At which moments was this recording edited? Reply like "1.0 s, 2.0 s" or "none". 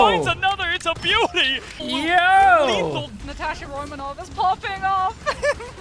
1.8 s, 3.2 s

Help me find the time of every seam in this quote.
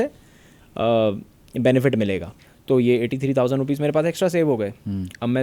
2.3 s

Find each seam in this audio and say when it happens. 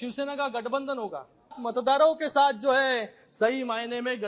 1.6 s

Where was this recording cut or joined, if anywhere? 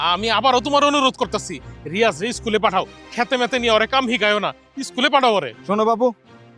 none

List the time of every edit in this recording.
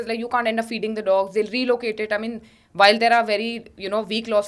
none

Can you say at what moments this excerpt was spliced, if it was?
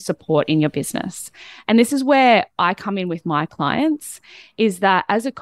none

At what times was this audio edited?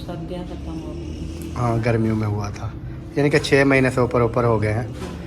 none

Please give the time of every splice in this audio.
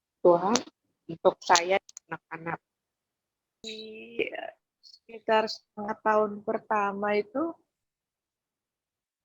3.6 s

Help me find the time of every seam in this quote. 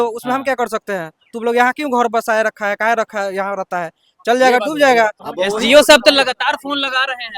5.2 s

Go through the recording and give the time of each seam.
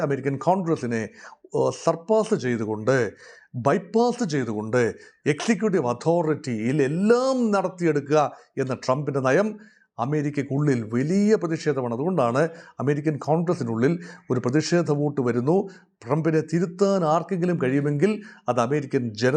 none

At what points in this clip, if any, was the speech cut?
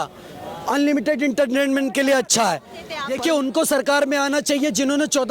3.0 s

